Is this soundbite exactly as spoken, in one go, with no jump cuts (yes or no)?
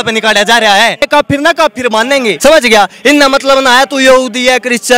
no